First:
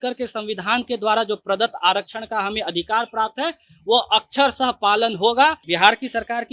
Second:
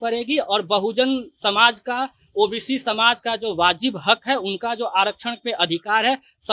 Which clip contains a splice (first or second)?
first